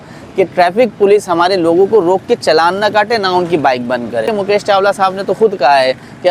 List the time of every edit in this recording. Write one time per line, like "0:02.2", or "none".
0:04.3